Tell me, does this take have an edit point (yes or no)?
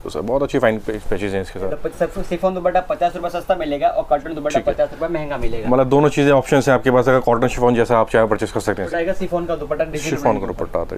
yes